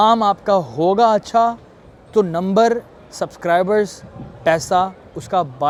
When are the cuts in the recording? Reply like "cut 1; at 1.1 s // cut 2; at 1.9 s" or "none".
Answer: none